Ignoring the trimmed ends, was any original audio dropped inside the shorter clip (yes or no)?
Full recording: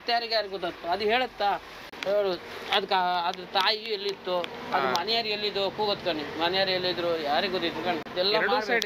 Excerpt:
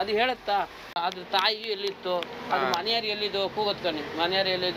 yes